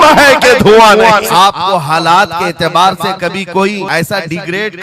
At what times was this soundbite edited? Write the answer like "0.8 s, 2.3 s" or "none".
1.3 s, 3.9 s